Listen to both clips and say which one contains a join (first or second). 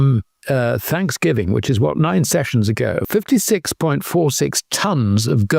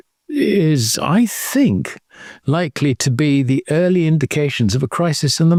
first